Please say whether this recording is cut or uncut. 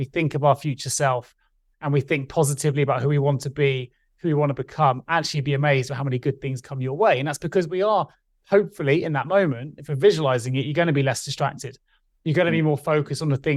uncut